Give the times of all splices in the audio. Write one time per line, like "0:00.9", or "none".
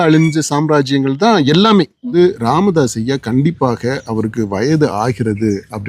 0:02.1